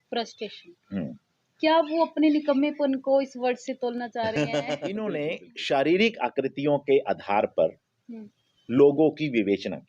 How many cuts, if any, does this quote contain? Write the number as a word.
one